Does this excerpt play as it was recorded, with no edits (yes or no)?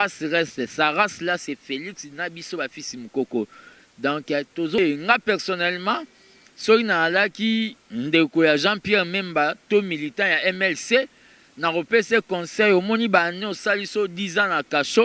no